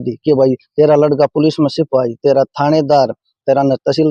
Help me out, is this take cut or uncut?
uncut